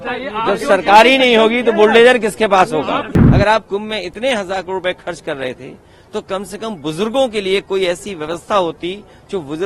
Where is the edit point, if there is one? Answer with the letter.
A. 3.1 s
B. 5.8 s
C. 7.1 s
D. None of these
A